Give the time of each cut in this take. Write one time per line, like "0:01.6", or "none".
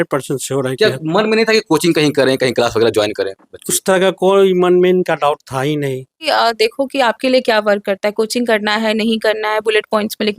0:06.2